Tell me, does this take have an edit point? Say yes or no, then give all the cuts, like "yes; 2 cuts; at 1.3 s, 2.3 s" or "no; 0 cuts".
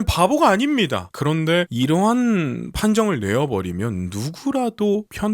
yes; 1 cut; at 1.0 s